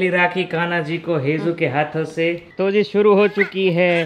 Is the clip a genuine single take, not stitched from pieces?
no; 1 cut; at 2.5 s

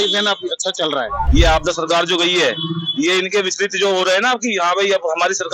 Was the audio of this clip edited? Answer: yes; 1 cut; at 1.3 s

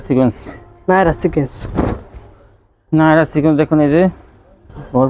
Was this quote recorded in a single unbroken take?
yes; 0 cuts

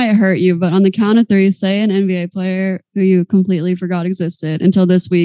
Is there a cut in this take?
no; 0 cuts

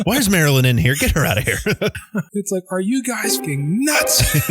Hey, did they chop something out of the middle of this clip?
yes; 2 cuts; at 2.0 s, 3.3 s

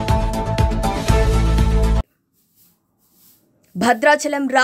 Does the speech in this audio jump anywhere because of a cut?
no; 0 cuts

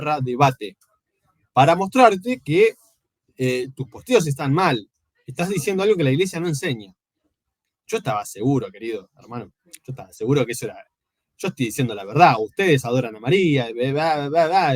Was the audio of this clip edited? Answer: no; 0 cuts

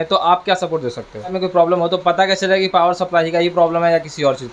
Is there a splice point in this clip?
yes; 1 cut; at 1.3 s

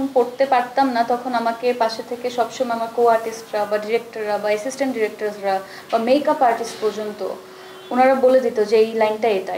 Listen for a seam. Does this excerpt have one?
no; 0 cuts

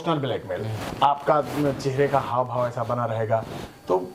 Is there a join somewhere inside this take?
no; 0 cuts

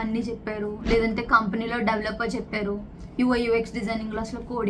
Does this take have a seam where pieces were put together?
no; 0 cuts

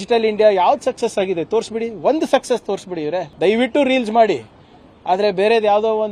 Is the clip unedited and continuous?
no; 1 cut; at 3.3 s

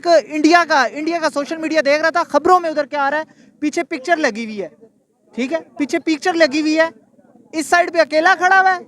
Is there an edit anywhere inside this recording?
no; 0 cuts

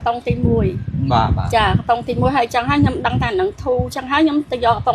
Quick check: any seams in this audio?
no; 0 cuts

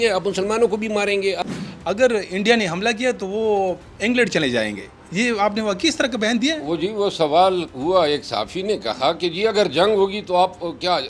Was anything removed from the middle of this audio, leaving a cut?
yes; 1 cut; at 1.4 s

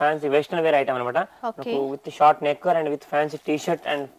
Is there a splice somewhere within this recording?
no; 0 cuts

